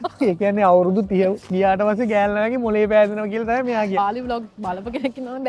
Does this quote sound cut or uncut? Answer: cut